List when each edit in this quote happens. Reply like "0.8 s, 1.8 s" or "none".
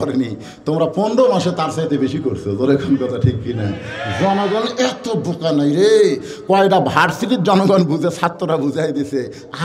none